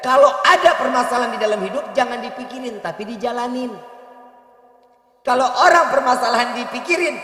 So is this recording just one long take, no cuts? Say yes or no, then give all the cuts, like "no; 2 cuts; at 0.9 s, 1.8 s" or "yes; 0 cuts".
yes; 0 cuts